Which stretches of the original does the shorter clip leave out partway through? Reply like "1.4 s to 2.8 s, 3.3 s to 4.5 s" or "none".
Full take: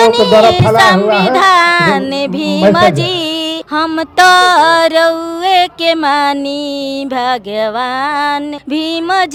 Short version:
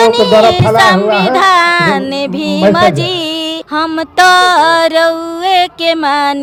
none